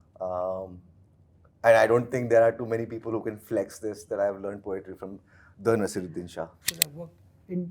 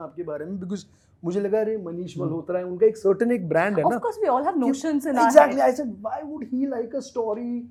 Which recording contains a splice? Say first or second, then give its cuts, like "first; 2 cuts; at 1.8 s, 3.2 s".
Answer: first; 1 cut; at 6.7 s